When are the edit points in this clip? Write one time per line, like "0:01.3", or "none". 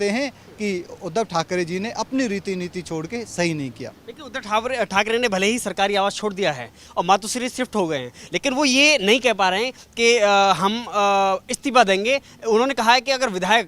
none